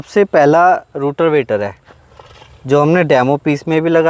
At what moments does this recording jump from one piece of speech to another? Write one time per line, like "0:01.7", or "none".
none

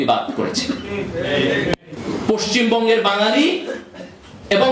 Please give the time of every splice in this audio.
0:02.0

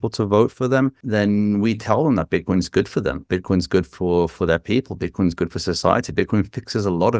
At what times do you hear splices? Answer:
0:01.0

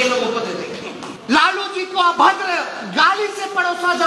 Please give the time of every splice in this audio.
0:01.1

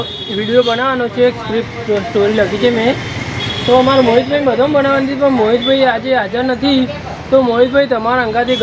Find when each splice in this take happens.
none

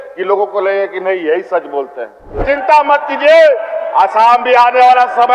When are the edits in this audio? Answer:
0:02.4

